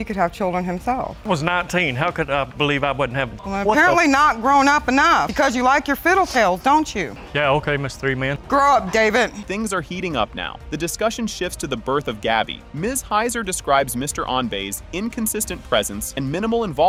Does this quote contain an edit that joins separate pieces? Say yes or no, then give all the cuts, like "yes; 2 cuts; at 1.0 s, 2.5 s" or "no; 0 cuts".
no; 0 cuts